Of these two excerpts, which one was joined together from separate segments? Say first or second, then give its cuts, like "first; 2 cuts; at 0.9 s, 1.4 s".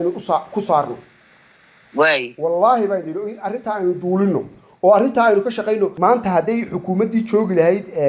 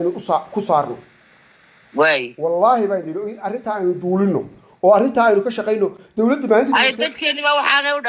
first; 1 cut; at 5.9 s